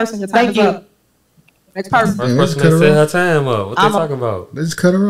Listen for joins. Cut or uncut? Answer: uncut